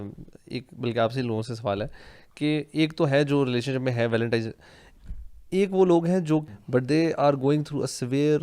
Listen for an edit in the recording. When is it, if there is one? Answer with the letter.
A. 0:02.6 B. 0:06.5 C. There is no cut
B